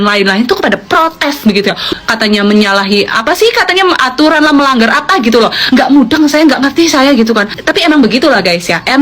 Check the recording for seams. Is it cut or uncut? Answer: cut